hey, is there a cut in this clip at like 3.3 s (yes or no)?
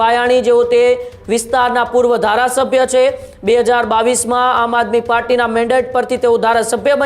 no